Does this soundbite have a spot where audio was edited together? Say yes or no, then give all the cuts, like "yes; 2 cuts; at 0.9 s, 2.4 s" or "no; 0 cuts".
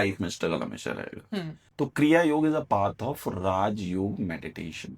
yes; 1 cut; at 1.6 s